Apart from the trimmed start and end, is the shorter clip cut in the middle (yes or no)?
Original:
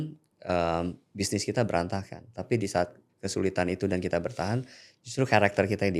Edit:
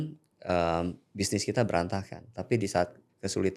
no